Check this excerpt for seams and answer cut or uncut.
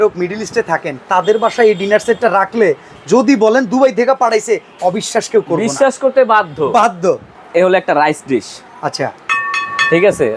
cut